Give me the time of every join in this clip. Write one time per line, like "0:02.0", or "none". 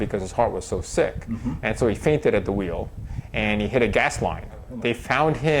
0:04.7